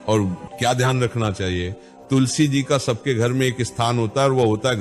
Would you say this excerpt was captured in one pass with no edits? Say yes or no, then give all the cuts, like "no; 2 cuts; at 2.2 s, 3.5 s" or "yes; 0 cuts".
yes; 0 cuts